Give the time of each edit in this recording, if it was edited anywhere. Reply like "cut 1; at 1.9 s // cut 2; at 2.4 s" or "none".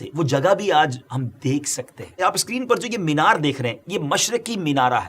cut 1; at 2.2 s